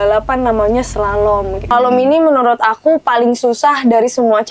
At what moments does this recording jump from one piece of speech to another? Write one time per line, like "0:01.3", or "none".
0:01.7